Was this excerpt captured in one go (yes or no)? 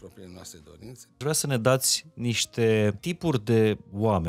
no